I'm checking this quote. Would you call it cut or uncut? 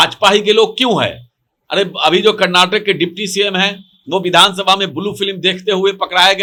uncut